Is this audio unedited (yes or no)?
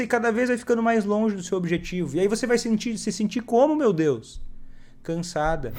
yes